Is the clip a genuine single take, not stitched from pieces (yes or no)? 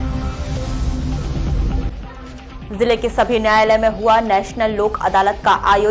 no